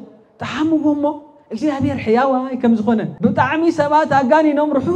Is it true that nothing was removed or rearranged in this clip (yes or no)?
no